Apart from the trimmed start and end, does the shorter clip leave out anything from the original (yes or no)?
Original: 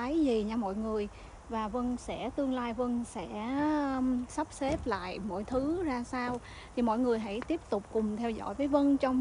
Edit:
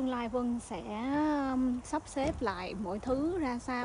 no